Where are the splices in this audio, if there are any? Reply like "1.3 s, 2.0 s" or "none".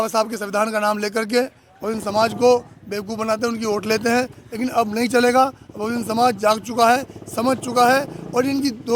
none